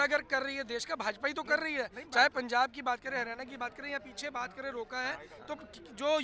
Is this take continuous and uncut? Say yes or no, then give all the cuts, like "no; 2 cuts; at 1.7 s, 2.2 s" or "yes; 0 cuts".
yes; 0 cuts